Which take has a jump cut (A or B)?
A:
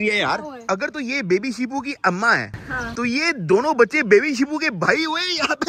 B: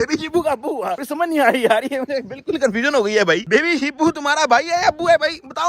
B